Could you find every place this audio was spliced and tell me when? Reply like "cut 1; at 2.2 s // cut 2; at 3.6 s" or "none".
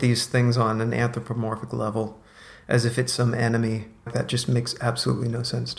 cut 1; at 4.1 s

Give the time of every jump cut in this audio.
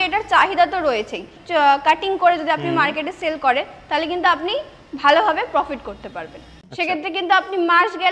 cut 1; at 1.3 s // cut 2; at 6.4 s

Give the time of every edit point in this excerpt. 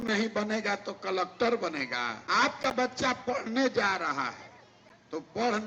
cut 1; at 2.2 s

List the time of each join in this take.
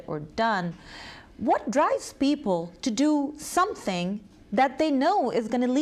cut 1; at 3.7 s

